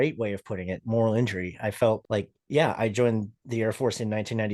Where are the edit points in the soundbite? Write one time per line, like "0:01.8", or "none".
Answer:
0:02.0